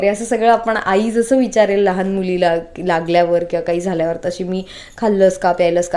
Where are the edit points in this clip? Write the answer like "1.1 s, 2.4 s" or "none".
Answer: none